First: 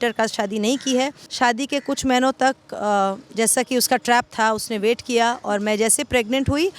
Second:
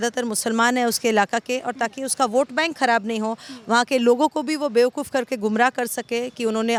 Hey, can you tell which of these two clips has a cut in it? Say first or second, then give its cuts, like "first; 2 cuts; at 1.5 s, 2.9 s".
first; 1 cut; at 1.2 s